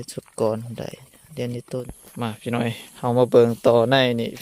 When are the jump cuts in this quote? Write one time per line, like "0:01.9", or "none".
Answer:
0:01.9